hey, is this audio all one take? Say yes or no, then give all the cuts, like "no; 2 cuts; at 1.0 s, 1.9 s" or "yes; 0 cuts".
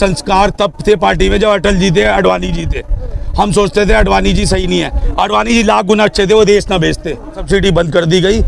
no; 1 cut; at 7.4 s